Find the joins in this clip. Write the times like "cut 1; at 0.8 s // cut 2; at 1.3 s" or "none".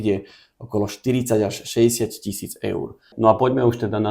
cut 1; at 3.1 s